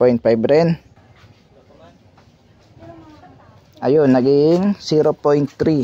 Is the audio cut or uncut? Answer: cut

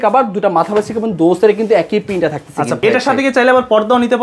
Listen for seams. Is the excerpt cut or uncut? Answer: cut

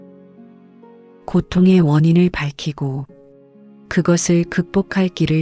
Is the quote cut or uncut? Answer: cut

